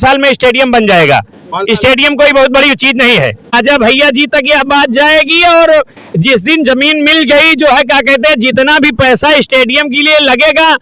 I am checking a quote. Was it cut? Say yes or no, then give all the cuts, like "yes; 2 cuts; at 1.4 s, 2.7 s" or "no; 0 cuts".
yes; 1 cut; at 3.5 s